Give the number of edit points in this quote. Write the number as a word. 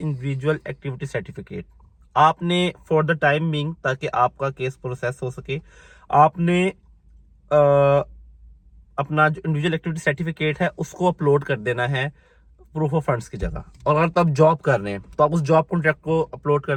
zero